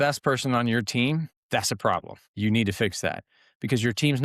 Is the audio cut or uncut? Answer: cut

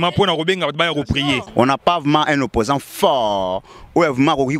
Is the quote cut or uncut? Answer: cut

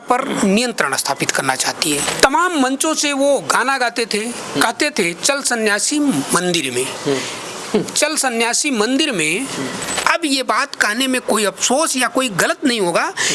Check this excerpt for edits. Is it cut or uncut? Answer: cut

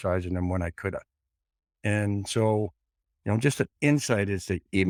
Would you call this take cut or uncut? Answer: uncut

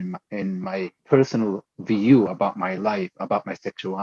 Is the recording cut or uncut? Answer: cut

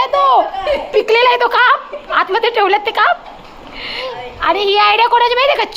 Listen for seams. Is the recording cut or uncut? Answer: cut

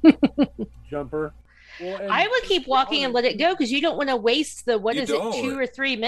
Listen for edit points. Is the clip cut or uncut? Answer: cut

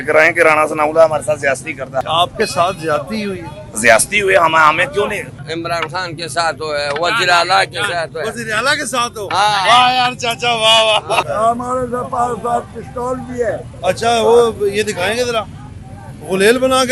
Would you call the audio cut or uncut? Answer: cut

